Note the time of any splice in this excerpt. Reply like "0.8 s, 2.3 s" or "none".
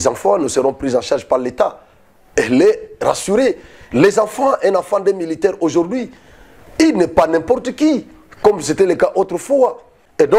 none